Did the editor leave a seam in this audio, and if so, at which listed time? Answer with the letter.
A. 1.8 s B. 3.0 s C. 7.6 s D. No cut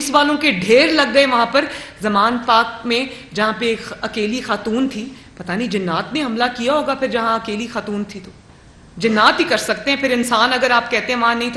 D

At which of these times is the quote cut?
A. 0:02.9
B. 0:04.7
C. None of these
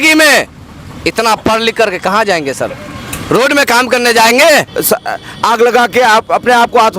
B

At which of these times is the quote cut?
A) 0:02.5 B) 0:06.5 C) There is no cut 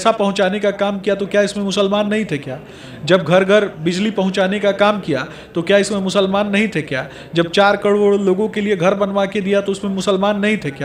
C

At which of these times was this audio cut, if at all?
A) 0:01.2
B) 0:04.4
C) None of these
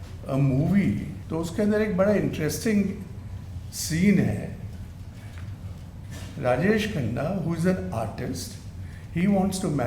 A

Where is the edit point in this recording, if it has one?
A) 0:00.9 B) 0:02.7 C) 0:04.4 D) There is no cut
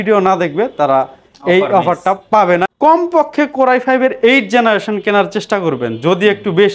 B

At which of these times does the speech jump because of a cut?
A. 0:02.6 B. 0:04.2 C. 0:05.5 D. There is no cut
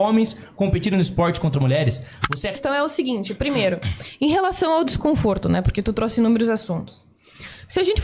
A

